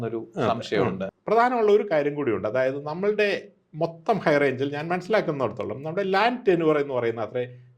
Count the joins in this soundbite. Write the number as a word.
one